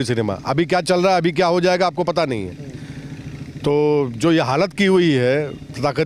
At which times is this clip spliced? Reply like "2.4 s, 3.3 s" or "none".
none